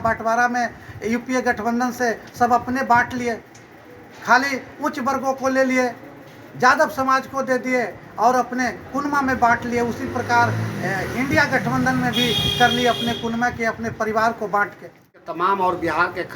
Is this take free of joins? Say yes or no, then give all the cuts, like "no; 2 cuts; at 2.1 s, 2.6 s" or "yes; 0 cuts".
no; 1 cut; at 15.2 s